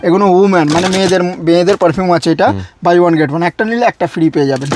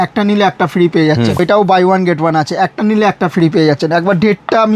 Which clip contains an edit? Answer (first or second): second